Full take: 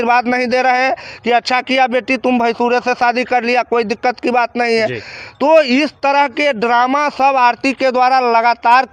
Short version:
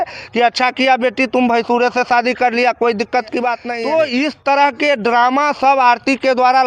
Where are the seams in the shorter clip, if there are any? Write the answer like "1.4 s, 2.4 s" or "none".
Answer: 3.7 s